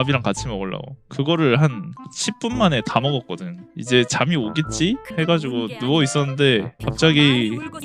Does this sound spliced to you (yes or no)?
yes